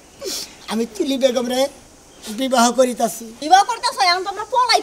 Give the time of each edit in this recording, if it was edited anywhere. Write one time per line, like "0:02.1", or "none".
0:03.3